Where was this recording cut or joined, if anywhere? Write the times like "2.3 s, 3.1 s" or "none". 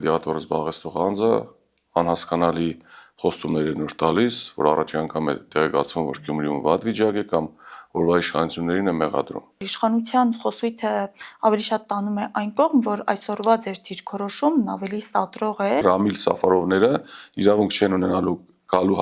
9.6 s, 15.8 s